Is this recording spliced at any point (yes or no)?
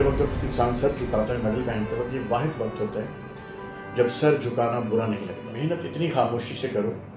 yes